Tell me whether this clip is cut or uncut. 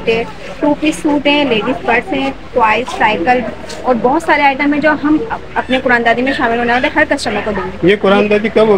uncut